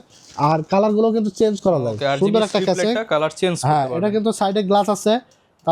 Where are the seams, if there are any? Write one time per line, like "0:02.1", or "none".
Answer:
none